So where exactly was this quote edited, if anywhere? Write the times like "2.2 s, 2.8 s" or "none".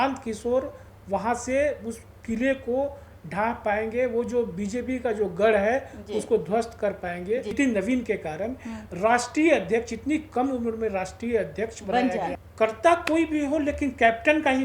7.5 s, 12.4 s